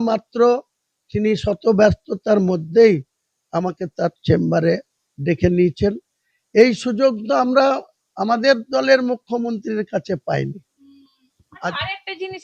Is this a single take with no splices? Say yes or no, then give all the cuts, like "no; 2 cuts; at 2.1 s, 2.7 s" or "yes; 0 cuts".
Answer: yes; 0 cuts